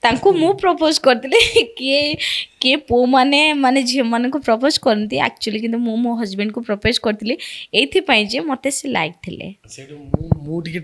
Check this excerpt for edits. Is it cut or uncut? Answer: uncut